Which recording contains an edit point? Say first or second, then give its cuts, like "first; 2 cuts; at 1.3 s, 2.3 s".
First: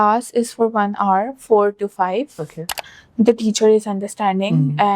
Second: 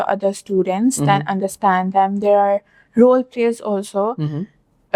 first; 1 cut; at 2.7 s